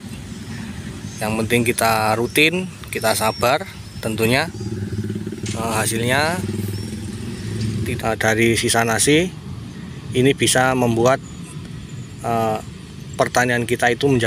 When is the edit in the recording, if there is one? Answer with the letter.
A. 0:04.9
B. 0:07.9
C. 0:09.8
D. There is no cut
B